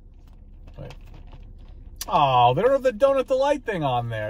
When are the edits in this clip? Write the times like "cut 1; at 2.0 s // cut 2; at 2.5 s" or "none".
none

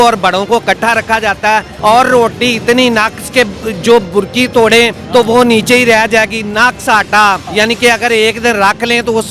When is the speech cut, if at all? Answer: cut 1; at 1.7 s // cut 2; at 5.0 s // cut 3; at 7.5 s

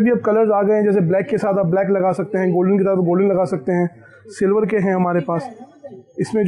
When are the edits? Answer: none

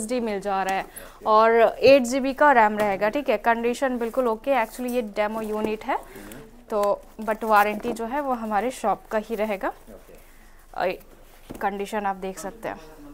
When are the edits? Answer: none

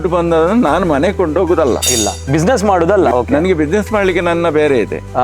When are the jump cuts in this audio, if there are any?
cut 1; at 3.1 s

